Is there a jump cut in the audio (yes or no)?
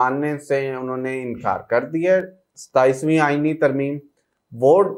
no